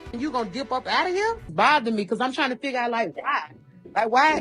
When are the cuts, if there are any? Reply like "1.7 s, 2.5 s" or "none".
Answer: 1.4 s